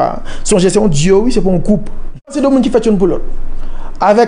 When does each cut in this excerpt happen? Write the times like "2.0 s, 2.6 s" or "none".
2.3 s